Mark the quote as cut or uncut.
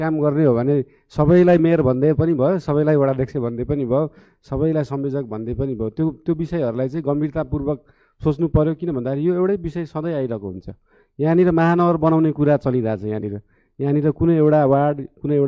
uncut